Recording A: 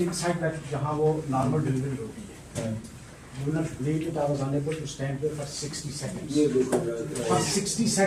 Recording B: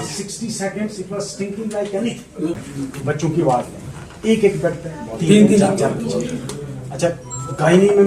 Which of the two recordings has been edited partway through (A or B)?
B